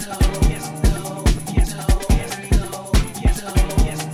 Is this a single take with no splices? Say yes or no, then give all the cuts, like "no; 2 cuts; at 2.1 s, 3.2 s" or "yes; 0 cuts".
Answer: yes; 0 cuts